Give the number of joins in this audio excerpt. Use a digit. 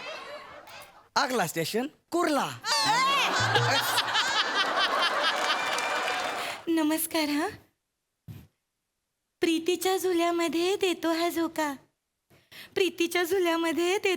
1